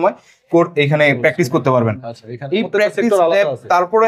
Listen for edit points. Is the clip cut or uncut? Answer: uncut